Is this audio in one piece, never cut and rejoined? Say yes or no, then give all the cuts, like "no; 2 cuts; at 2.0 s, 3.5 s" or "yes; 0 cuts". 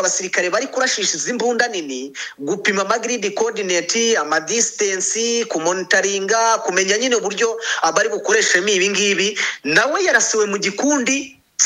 yes; 0 cuts